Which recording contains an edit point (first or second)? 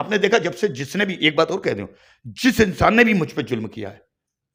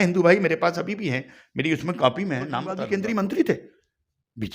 second